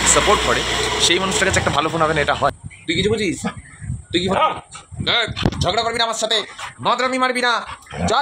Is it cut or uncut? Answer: cut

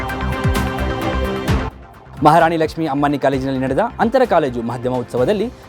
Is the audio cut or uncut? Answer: cut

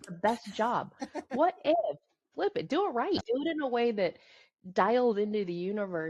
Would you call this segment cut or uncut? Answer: cut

